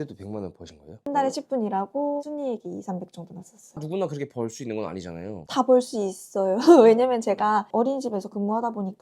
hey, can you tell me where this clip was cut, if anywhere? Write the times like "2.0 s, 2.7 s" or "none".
1.1 s, 2.2 s, 3.6 s, 5.4 s